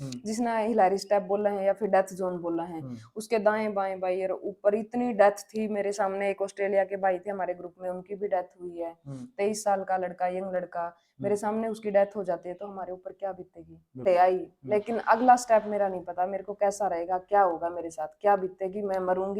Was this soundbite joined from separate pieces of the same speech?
yes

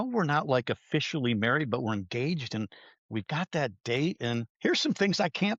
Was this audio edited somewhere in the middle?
yes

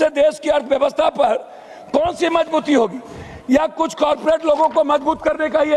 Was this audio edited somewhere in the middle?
no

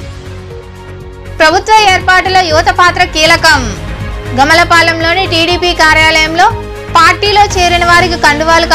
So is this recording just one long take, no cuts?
no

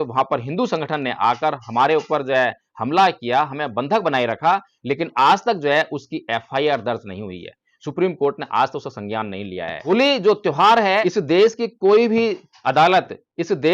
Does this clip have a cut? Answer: yes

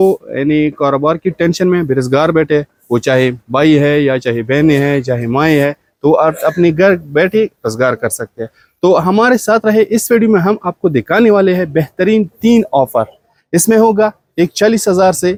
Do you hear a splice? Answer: no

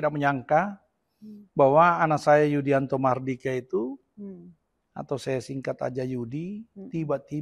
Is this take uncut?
yes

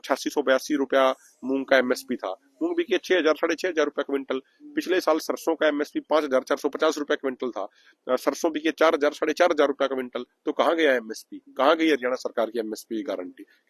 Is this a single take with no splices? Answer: yes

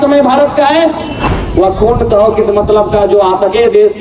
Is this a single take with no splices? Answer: no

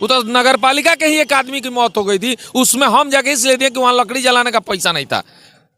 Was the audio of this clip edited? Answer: no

